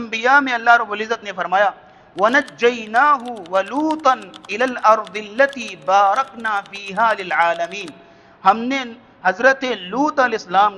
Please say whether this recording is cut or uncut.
uncut